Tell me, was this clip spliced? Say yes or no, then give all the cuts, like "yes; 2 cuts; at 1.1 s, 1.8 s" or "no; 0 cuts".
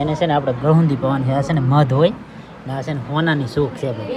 no; 0 cuts